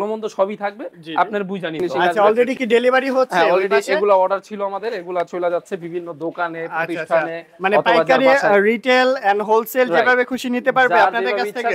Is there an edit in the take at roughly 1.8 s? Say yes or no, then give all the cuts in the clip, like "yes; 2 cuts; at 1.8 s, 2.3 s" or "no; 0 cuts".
yes; 1 cut; at 1.8 s